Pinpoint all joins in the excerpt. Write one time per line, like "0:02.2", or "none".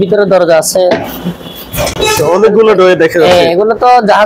none